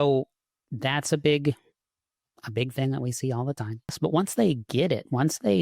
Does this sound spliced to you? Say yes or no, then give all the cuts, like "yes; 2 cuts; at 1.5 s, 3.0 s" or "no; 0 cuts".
yes; 1 cut; at 3.9 s